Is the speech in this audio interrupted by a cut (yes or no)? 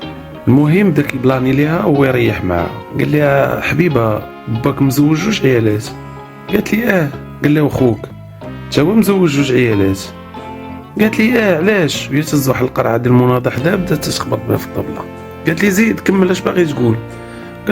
yes